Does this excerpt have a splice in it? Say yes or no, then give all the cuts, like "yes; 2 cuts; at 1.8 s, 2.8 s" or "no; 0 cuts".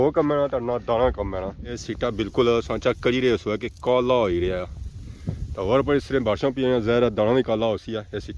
yes; 1 cut; at 1.8 s